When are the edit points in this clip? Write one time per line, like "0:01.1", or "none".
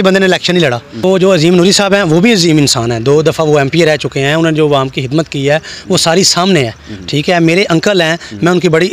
0:00.9